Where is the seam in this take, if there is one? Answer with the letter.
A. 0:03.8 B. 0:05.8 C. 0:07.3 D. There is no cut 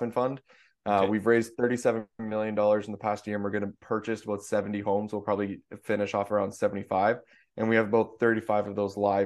A